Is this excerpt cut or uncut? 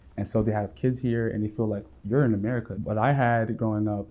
cut